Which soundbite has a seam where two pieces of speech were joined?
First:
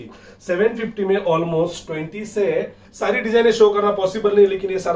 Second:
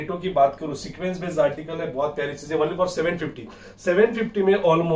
first; 1 cut; at 2.8 s

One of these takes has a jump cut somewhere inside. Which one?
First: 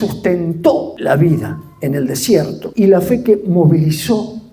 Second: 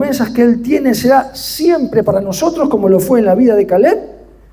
first; 2 cuts; at 0.9 s, 2.6 s

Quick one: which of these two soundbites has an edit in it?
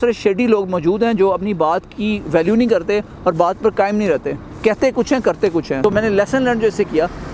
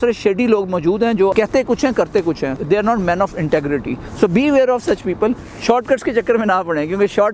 second; 4 cuts; at 1.3 s, 2.5 s, 4.0 s, 5.5 s

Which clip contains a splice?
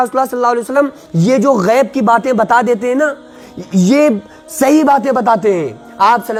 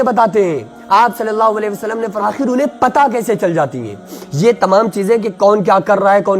second; 1 cut; at 2.3 s

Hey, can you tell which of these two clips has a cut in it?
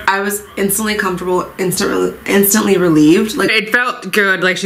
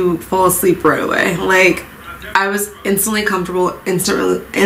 first; 1 cut; at 3.5 s

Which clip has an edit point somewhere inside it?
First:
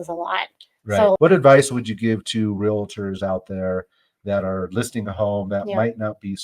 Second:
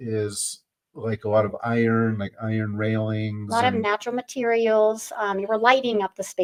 first; 1 cut; at 1.2 s

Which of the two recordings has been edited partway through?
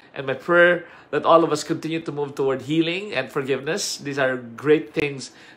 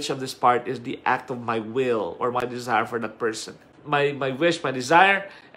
second; 1 cut; at 3.7 s

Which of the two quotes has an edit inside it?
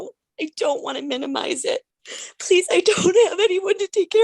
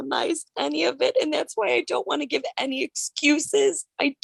first; 1 cut; at 2.0 s

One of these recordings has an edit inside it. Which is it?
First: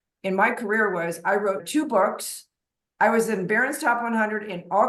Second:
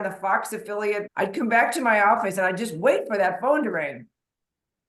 second; 1 cut; at 1.1 s

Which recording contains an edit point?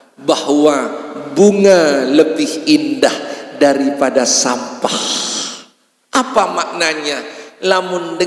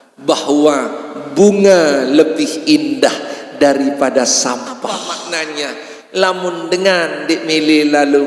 second; 1 cut; at 5.1 s

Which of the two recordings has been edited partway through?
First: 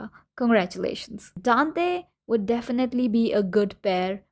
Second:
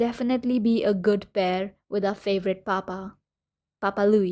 first; 1 cut; at 1.3 s

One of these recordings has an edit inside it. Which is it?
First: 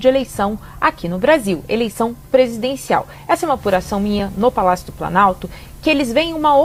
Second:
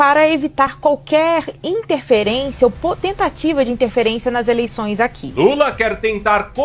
second; 1 cut; at 5.2 s

